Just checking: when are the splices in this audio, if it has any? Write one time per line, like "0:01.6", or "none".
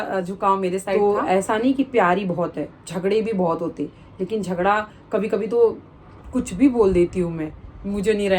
0:01.0